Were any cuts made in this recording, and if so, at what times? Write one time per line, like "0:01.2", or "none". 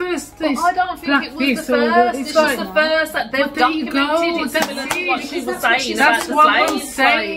none